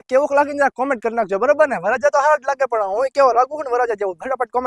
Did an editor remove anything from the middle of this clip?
no; 0 cuts

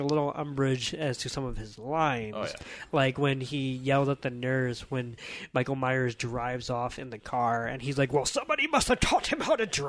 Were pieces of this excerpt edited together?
no; 0 cuts

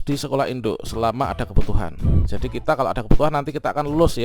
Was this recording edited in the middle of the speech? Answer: no; 0 cuts

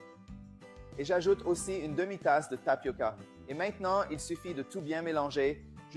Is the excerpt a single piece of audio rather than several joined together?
no; 1 cut; at 0.9 s

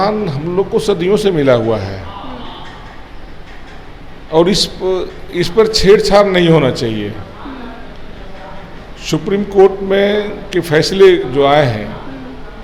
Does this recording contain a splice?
no; 0 cuts

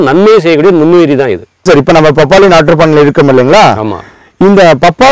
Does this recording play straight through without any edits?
no; 1 cut; at 1.6 s

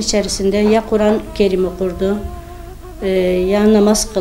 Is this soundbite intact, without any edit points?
yes; 0 cuts

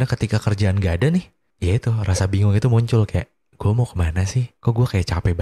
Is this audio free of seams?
no; 2 cuts; at 1.4 s, 4.5 s

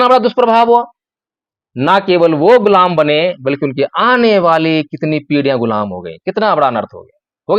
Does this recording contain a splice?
no; 0 cuts

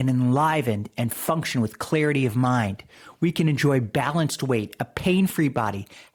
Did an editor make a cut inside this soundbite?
no; 0 cuts

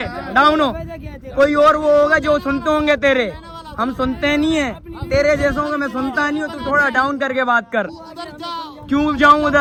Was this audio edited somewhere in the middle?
no; 0 cuts

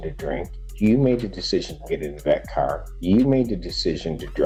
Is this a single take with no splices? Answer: yes; 0 cuts

